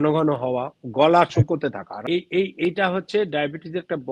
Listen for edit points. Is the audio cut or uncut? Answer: cut